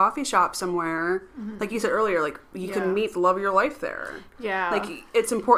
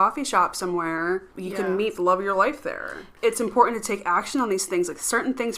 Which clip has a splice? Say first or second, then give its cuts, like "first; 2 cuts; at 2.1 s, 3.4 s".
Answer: second; 2 cuts; at 1.4 s, 3.1 s